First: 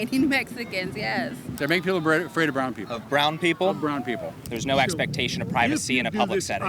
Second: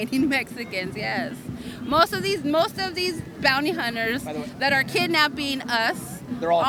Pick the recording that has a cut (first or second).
first